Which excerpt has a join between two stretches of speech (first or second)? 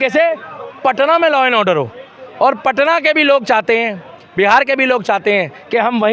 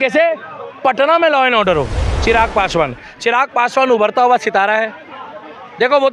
second